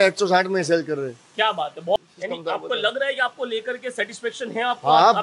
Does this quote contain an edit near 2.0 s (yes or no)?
yes